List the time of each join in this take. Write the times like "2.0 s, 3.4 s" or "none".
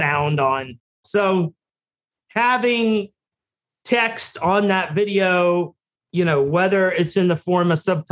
1.0 s